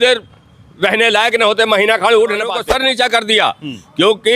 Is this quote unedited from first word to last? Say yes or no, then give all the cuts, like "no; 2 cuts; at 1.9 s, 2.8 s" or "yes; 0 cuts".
no; 1 cut; at 2.6 s